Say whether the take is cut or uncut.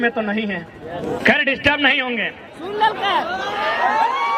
cut